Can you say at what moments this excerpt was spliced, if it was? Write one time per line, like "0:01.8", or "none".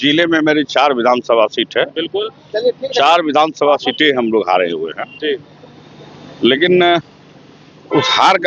none